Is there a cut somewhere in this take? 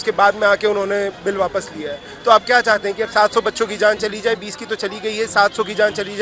no; 0 cuts

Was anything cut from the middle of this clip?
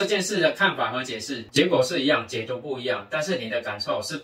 yes; 1 cut; at 1.4 s

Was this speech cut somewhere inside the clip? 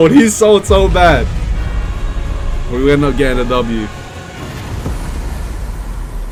no; 0 cuts

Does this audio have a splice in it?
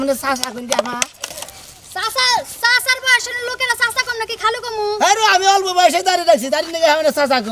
no; 0 cuts

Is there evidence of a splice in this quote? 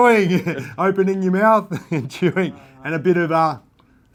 no; 0 cuts

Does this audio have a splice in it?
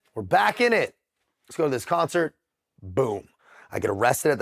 yes; 1 cut; at 3.4 s

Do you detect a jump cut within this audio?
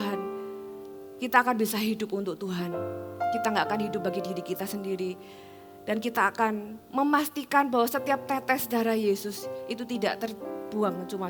no; 0 cuts

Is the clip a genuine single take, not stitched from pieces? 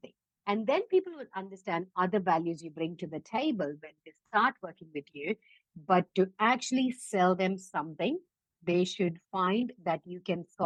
yes; 0 cuts

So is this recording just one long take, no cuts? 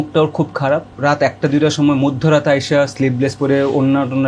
no; 1 cut; at 0.9 s

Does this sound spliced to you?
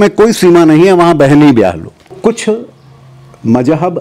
yes; 1 cut; at 2.1 s

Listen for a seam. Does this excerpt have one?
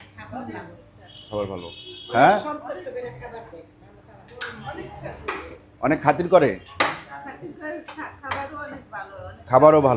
no; 0 cuts

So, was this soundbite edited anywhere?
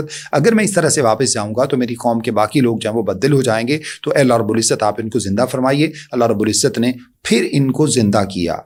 no; 0 cuts

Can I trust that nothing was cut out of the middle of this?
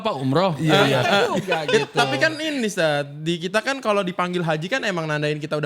yes; 0 cuts

